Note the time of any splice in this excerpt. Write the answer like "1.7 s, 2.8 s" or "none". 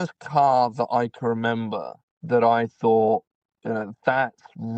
none